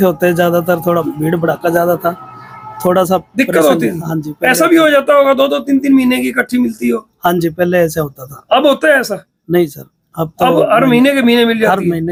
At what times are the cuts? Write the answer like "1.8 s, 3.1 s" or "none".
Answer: none